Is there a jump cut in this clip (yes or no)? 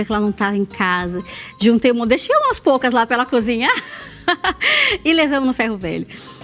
no